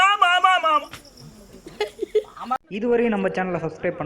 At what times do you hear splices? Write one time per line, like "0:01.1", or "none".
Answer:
0:02.5